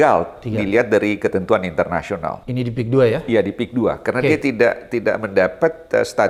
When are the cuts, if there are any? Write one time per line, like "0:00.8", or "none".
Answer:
none